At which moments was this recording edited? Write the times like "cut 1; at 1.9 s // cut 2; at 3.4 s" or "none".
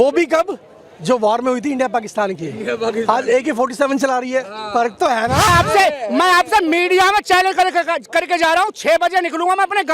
cut 1; at 5.5 s

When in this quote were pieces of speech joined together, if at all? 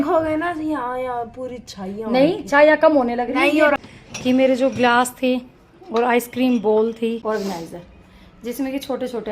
cut 1; at 3.8 s // cut 2; at 7.2 s

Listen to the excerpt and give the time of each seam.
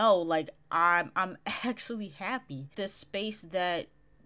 cut 1; at 2.6 s

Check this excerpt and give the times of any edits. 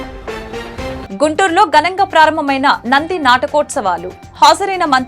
cut 1; at 1.0 s

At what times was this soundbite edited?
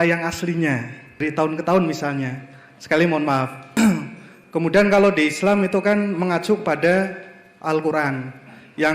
cut 1; at 1.1 s // cut 2; at 3.6 s

